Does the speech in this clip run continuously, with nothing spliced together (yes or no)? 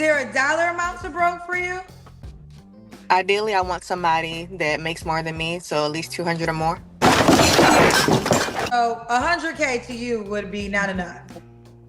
no